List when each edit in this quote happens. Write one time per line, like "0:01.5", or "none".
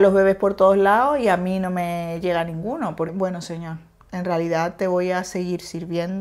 0:03.1